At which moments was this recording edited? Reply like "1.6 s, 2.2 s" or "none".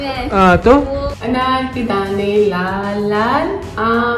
1.1 s